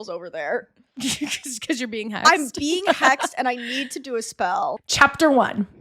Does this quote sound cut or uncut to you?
cut